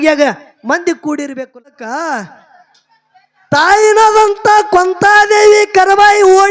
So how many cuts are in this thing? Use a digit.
1